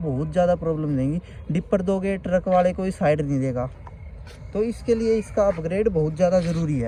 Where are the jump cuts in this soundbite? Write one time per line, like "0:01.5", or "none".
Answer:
none